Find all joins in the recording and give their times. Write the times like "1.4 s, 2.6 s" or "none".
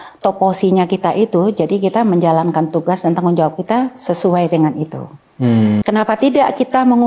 5.8 s